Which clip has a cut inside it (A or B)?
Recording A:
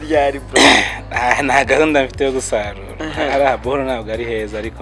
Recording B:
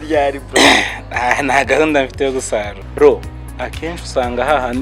B